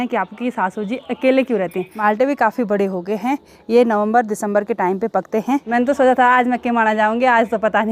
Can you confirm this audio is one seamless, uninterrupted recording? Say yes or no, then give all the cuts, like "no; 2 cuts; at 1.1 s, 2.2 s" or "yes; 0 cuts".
no; 2 cuts; at 1.9 s, 5.7 s